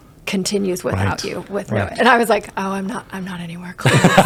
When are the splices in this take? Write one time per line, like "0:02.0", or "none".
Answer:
none